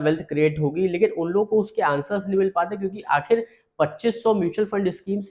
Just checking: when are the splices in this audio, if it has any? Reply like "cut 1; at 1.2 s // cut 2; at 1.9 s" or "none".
none

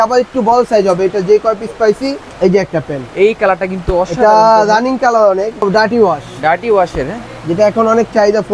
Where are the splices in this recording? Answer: cut 1; at 2.2 s // cut 2; at 5.6 s

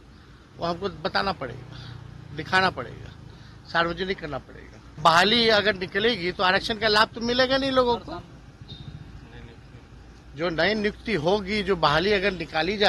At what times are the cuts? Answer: cut 1; at 5.0 s

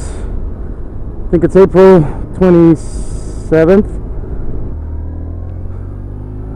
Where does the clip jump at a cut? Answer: none

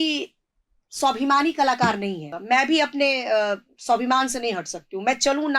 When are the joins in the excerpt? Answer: cut 1; at 2.3 s

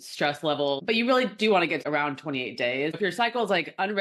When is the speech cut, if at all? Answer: cut 1; at 0.8 s // cut 2; at 1.8 s // cut 3; at 3.0 s

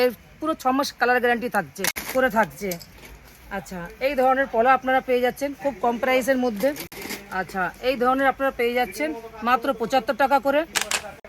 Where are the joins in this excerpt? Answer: cut 1; at 2.0 s

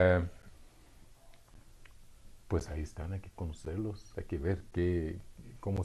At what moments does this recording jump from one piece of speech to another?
cut 1; at 4.3 s

